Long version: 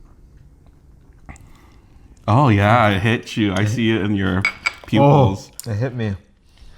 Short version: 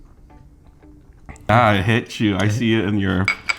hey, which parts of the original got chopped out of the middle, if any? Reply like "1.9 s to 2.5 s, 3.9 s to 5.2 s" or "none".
1.5 s to 2.7 s